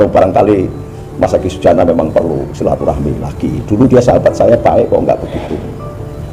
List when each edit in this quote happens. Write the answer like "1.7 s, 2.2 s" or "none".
none